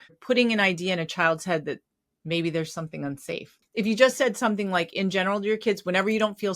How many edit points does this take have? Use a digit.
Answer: 1